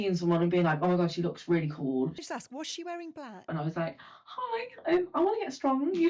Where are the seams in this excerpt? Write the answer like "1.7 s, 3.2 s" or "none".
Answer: 2.2 s, 3.5 s